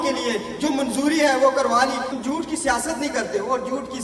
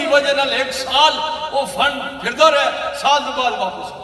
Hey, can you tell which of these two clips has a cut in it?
first; 1 cut; at 2.1 s

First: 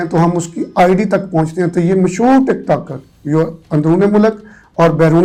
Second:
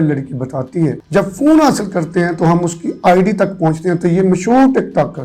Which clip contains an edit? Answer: second; 1 cut; at 1.0 s

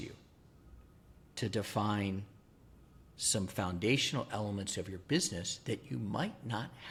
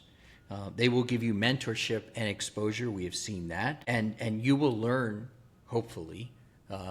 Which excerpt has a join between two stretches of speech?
second; 1 cut; at 3.8 s

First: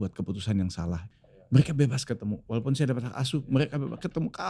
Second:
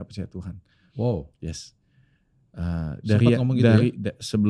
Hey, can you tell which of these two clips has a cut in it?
first; 1 cut; at 1.0 s

